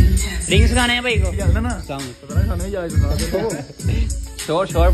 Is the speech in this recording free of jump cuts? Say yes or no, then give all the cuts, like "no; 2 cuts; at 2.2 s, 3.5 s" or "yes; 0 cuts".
yes; 0 cuts